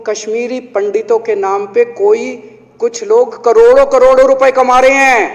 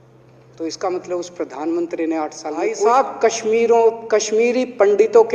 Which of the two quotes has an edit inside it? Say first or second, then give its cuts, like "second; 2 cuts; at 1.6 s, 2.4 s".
second; 1 cut; at 2.7 s